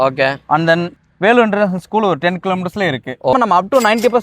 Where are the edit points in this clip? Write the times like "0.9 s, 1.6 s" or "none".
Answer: 3.3 s

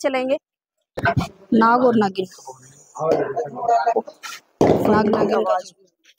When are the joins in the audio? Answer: 1.0 s

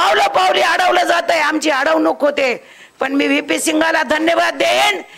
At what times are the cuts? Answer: none

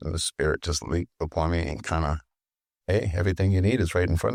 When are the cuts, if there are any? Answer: none

